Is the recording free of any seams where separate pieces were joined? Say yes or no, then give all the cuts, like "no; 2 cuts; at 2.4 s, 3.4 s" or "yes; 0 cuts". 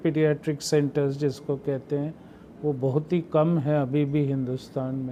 yes; 0 cuts